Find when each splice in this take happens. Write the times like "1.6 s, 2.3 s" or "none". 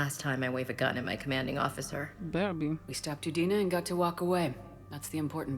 none